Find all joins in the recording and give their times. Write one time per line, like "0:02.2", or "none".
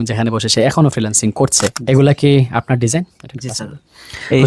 0:01.8